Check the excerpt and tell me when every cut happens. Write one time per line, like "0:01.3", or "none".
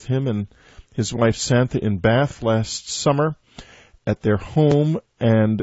none